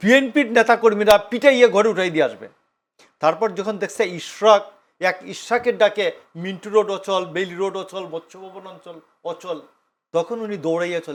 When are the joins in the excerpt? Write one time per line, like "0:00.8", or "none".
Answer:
none